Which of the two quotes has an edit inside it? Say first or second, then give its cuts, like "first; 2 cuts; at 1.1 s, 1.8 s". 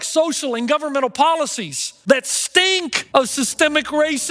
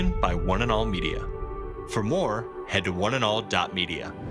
first; 2 cuts; at 2.0 s, 3.0 s